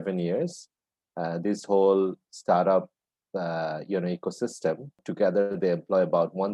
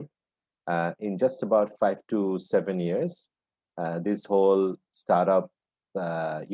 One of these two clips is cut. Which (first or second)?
first